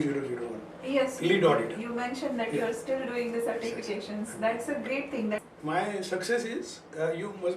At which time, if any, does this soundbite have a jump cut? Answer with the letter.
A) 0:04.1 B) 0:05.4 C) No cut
B